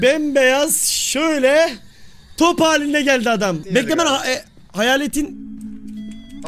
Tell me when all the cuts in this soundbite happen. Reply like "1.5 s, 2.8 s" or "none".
3.6 s